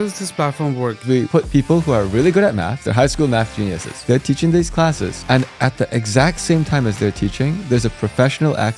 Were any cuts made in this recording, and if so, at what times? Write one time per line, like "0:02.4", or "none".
0:01.0
0:02.8
0:03.9